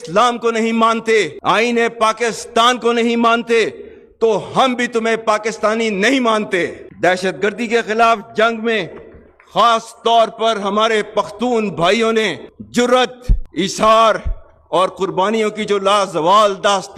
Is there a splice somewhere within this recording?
no; 0 cuts

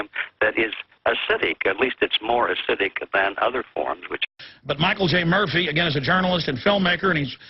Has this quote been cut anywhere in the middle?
no; 0 cuts

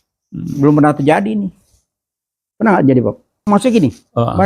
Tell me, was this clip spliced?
yes; 1 cut; at 3.4 s

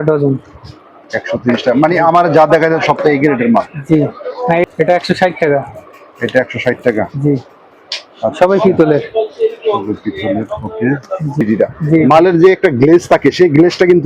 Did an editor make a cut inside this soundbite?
yes; 2 cuts; at 4.7 s, 11.4 s

